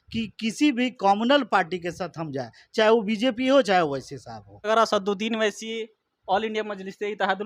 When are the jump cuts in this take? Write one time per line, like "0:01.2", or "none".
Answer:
0:04.7